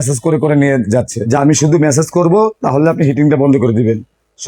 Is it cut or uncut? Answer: cut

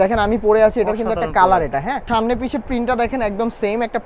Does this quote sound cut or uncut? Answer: cut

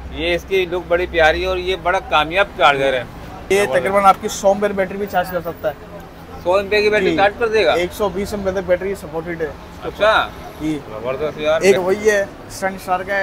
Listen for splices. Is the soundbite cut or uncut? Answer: cut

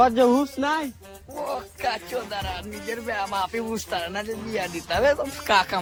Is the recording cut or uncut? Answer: uncut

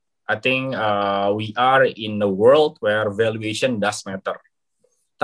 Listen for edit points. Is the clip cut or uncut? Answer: uncut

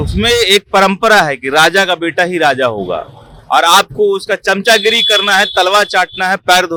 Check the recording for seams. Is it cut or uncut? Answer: uncut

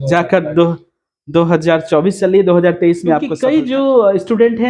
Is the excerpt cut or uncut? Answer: cut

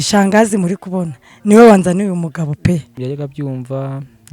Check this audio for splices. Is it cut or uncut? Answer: cut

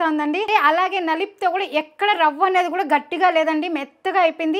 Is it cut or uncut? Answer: uncut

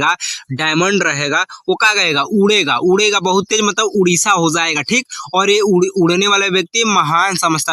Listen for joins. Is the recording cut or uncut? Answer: uncut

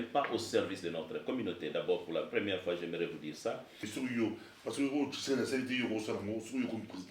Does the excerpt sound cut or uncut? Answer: cut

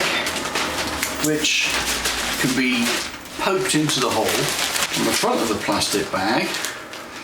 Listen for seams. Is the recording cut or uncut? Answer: cut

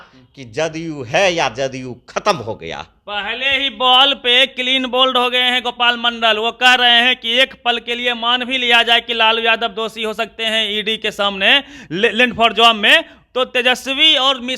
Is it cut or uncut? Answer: uncut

